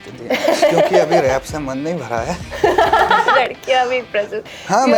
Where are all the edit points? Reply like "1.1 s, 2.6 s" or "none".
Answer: 1.2 s, 3.3 s